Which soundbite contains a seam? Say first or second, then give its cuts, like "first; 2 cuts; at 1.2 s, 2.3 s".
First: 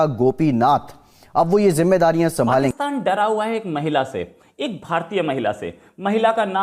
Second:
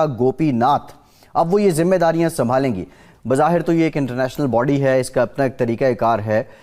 first; 1 cut; at 2.8 s